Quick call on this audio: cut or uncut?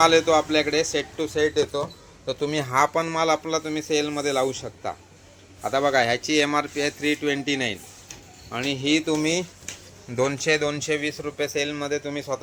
uncut